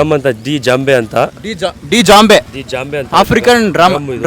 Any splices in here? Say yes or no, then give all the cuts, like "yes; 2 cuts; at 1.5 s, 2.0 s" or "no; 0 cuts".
no; 0 cuts